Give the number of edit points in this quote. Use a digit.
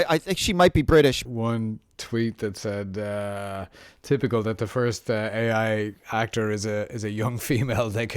1